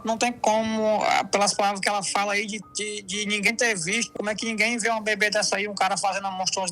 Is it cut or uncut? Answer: cut